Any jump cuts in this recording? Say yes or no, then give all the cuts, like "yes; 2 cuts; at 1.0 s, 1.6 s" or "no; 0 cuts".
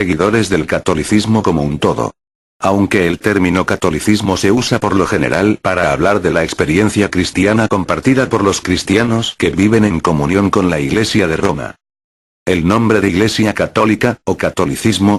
yes; 1 cut; at 1.2 s